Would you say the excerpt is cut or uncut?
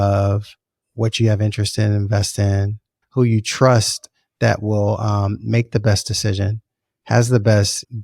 cut